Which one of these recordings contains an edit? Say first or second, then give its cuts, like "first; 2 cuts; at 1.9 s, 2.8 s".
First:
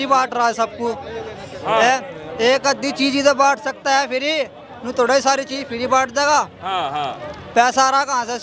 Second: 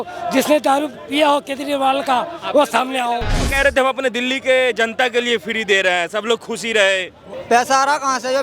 second; 2 cuts; at 3.5 s, 7.3 s